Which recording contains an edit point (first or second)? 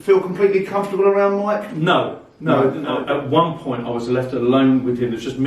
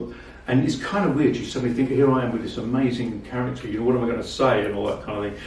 first